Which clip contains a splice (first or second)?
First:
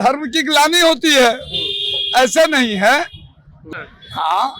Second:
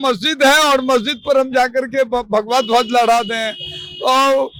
first